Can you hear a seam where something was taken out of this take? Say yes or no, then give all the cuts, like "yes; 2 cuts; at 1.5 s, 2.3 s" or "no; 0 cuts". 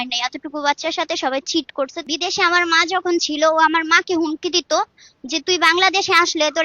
yes; 1 cut; at 2.0 s